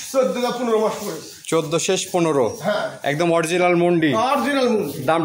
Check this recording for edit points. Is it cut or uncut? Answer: uncut